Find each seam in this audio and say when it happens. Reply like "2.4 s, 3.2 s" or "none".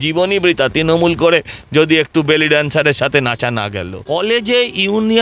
3.9 s